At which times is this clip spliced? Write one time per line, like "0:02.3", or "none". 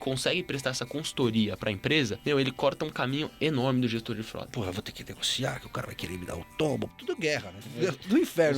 0:02.2
0:04.5
0:07.4